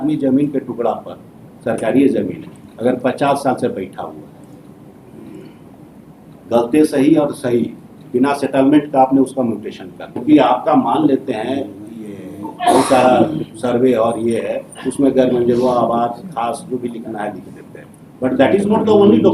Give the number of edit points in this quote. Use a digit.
1